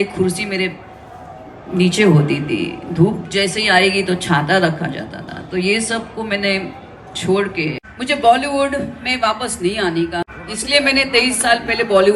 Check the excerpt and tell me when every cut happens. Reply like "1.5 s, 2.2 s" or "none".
7.9 s, 10.3 s